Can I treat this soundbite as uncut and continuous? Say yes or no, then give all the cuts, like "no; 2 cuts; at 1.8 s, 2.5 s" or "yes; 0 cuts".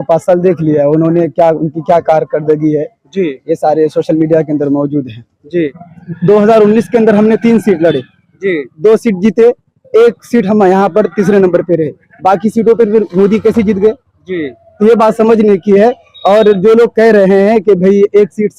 no; 1 cut; at 5.7 s